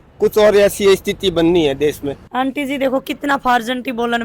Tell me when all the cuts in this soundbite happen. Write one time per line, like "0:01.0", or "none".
0:02.1